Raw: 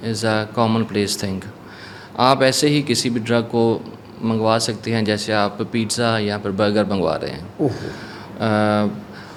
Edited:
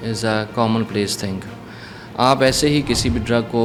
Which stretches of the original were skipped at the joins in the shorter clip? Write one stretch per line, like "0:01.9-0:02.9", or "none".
none